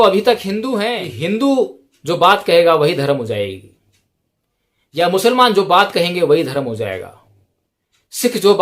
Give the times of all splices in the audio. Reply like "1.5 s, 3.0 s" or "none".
1.0 s